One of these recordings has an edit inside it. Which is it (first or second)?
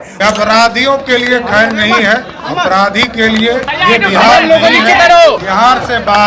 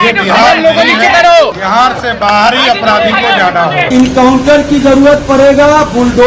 second